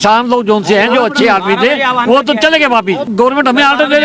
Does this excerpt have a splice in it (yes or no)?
yes